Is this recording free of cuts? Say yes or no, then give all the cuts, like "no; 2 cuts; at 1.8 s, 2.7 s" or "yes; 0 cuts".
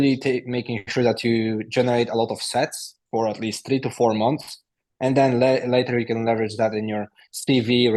yes; 0 cuts